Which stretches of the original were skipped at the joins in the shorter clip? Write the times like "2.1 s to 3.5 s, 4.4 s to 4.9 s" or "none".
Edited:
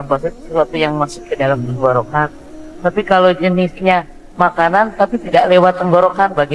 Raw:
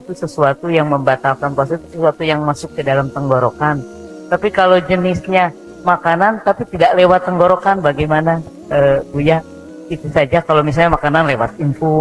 none